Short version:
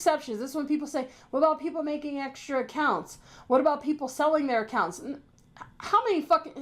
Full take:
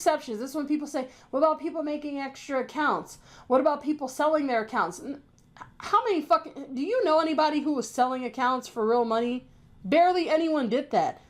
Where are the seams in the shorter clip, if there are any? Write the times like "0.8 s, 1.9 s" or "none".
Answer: none